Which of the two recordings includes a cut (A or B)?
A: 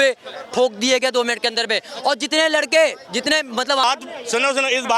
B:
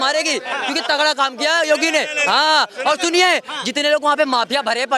A